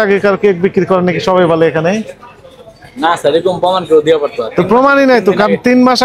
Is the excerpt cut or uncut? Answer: uncut